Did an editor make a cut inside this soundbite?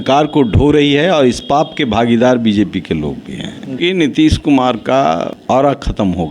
yes; 2 cuts; at 3.8 s, 5.4 s

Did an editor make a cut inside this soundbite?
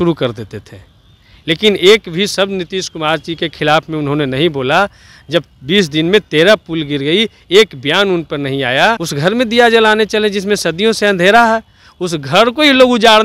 yes; 1 cut; at 9.1 s

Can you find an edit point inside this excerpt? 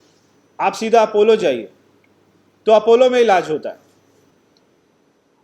yes; 1 cut; at 4.3 s

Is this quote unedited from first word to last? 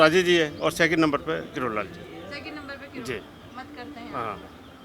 yes; 0 cuts

